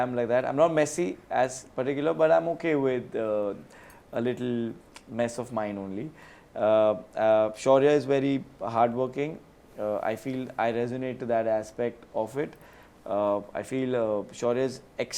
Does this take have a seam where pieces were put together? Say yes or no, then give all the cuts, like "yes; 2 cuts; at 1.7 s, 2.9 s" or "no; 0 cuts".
no; 0 cuts